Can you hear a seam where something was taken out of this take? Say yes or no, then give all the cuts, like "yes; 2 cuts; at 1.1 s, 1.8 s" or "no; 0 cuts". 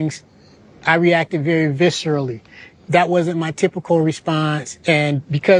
no; 0 cuts